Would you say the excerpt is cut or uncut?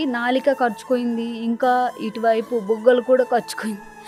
uncut